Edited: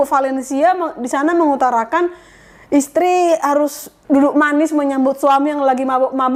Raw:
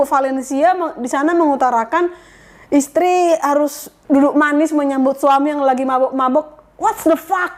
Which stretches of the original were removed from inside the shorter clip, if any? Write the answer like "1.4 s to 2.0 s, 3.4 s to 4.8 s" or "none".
none